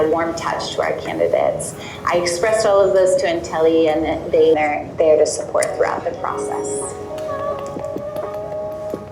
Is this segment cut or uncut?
uncut